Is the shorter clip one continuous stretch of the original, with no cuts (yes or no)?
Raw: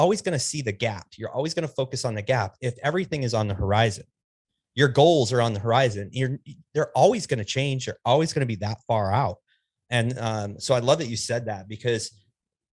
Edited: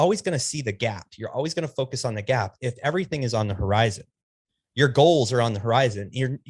yes